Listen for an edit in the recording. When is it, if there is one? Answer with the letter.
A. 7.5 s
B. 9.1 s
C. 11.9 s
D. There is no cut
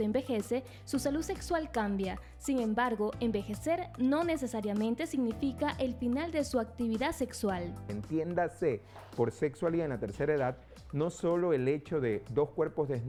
D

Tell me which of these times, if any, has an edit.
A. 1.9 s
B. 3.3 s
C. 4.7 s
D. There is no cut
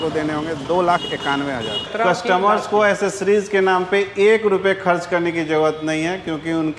A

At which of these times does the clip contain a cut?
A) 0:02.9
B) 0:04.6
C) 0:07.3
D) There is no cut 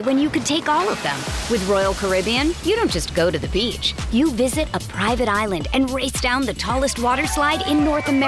D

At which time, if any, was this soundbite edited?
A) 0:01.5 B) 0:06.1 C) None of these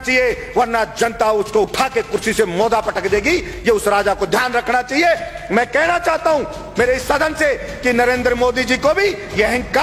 C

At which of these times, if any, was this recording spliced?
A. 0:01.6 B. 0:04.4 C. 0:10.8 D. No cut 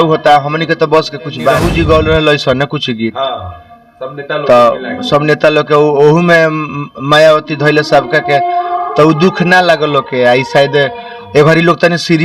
A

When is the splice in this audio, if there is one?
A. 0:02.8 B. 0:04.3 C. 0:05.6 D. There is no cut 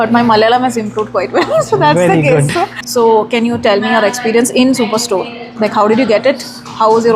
A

